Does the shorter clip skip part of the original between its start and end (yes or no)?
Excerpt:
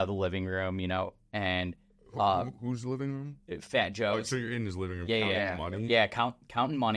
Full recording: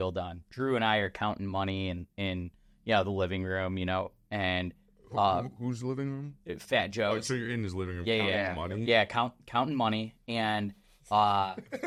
no